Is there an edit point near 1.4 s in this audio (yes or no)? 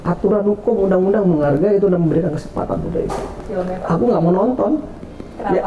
no